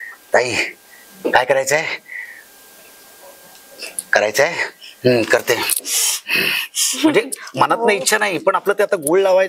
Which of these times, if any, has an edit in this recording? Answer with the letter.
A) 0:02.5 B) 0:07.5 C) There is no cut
C